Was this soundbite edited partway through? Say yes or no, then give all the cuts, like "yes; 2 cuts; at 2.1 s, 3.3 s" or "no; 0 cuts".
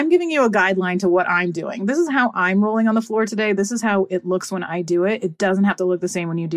no; 0 cuts